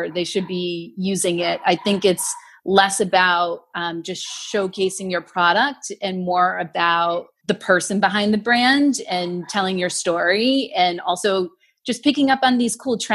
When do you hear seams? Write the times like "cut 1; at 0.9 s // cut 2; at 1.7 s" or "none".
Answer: cut 1; at 7.3 s

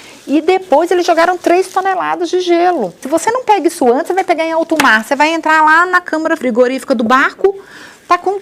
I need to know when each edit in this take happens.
cut 1; at 3.0 s // cut 2; at 6.4 s

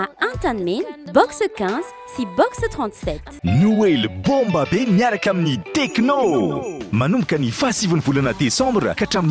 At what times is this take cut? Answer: cut 1; at 3.3 s

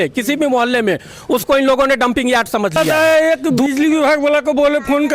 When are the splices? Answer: cut 1; at 2.8 s

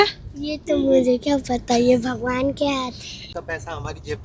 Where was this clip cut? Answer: cut 1; at 3.3 s

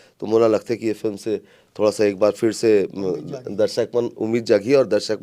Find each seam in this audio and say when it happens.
none

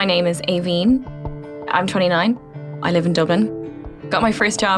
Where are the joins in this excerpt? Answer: cut 1; at 1.1 s // cut 2; at 2.4 s // cut 3; at 3.5 s

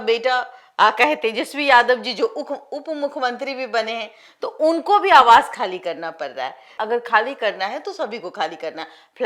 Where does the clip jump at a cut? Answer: cut 1; at 6.7 s

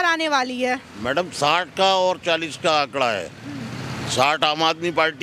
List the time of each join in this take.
none

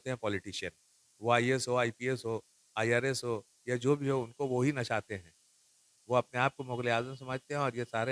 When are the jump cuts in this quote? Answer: none

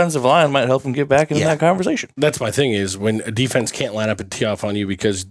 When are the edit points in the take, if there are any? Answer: cut 1; at 2.1 s

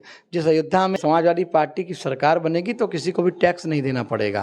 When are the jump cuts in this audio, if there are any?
cut 1; at 0.9 s

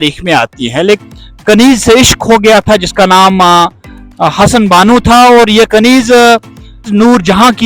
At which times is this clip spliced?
cut 1; at 1.0 s

